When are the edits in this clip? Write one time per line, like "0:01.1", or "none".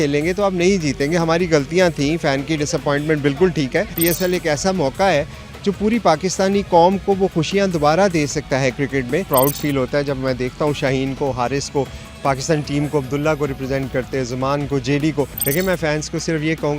0:03.9
0:09.3
0:15.4